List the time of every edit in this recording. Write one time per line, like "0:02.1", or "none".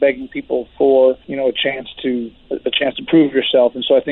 0:01.3
0:02.4